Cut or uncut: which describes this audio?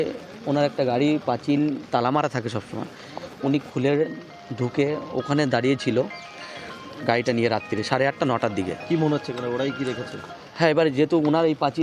uncut